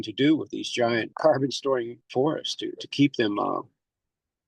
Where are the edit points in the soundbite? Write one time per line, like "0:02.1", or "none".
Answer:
0:01.1
0:02.0